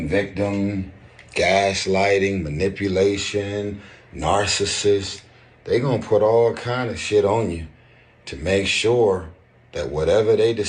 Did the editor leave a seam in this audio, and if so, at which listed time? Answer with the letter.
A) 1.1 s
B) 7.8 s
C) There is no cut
C